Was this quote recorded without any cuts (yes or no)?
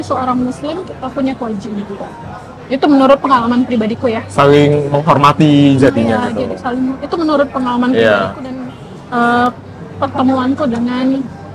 yes